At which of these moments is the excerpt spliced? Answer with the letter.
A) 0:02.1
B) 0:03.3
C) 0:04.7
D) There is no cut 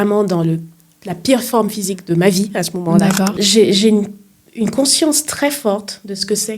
B